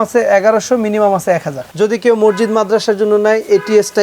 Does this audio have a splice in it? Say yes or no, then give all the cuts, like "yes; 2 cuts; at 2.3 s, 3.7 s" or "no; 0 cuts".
yes; 1 cut; at 1.6 s